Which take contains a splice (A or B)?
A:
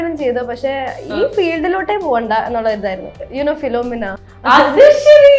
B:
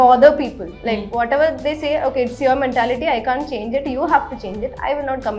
A